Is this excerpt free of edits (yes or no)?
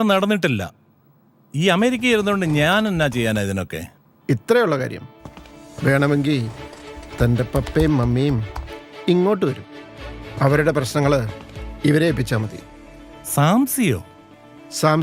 yes